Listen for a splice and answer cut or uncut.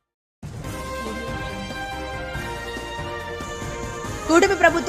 uncut